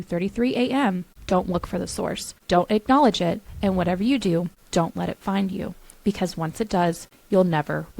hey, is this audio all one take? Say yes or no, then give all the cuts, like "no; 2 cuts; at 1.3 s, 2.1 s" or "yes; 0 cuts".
no; 4 cuts; at 1.1 s, 2.3 s, 4.6 s, 7.1 s